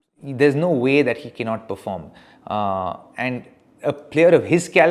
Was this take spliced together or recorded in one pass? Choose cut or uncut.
uncut